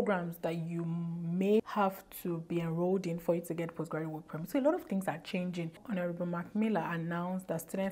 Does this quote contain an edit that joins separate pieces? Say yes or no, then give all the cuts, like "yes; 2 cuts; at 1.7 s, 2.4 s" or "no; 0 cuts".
yes; 2 cuts; at 1.6 s, 5.8 s